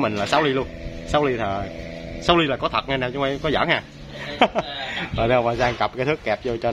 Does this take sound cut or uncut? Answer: uncut